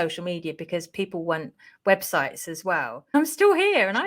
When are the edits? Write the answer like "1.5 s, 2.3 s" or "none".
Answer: 3.1 s